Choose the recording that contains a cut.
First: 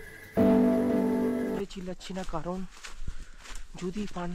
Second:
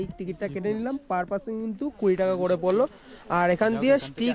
first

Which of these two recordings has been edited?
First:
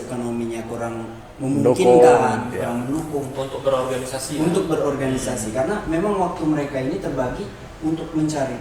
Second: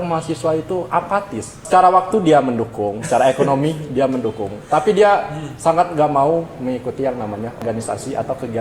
second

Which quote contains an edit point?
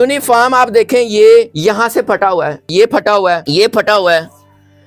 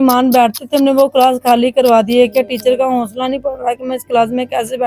first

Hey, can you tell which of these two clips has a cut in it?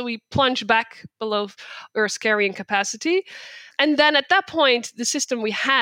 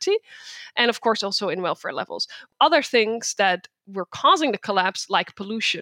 second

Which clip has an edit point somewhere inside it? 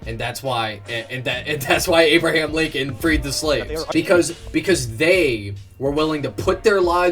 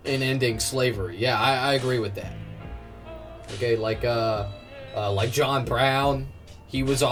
first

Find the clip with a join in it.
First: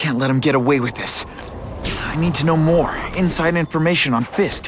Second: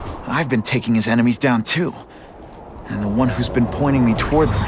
first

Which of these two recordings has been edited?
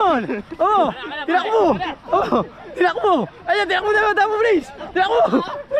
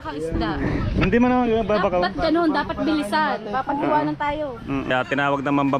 second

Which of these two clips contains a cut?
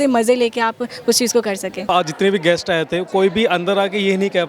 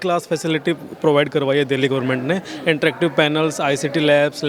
first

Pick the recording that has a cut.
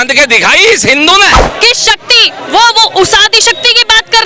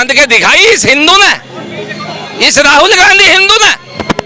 first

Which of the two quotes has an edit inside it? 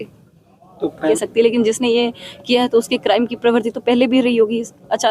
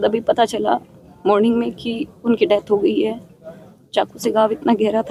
first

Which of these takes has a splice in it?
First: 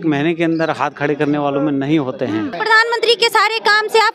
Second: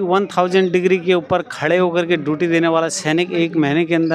first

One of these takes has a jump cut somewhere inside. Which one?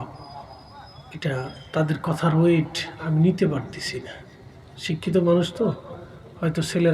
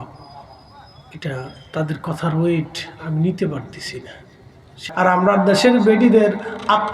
second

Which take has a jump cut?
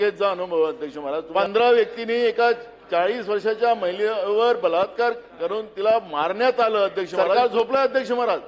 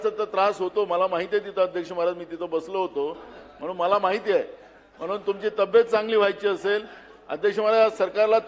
first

